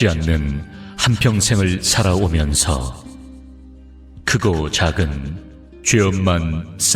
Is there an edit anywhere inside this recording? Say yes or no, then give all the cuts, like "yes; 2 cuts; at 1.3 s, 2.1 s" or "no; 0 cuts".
no; 0 cuts